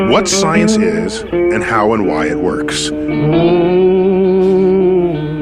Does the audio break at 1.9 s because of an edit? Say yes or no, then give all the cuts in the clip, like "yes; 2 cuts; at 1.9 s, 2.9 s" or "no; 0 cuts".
no; 0 cuts